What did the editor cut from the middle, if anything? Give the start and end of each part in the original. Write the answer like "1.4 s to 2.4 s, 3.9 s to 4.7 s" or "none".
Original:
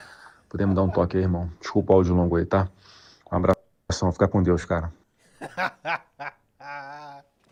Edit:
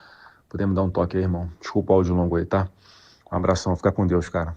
3.6 s to 4.0 s